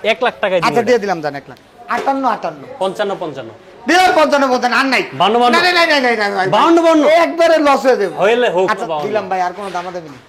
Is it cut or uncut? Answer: cut